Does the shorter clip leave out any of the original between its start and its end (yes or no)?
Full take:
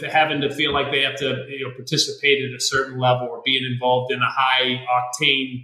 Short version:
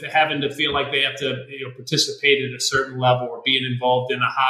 no